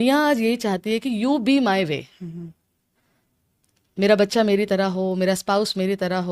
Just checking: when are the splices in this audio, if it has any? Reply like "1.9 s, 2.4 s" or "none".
none

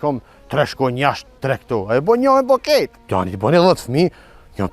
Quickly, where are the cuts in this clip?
3.0 s

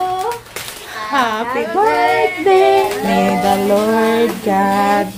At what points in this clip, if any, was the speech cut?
2.9 s

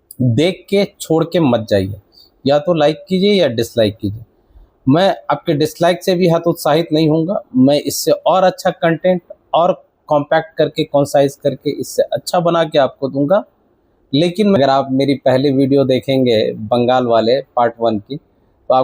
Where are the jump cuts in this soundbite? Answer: 14.6 s

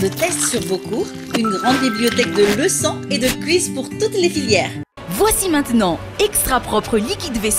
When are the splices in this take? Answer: 5.0 s

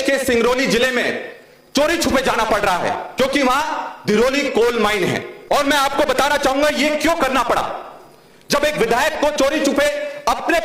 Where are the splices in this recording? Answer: none

